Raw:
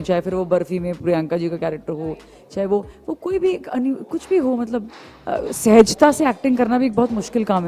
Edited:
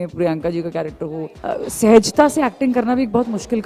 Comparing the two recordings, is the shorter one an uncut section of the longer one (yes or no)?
no